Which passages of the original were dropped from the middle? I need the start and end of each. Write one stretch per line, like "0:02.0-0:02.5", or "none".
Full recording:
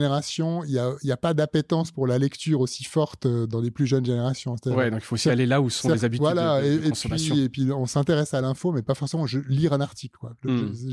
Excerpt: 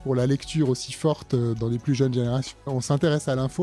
0:04.6-0:07.7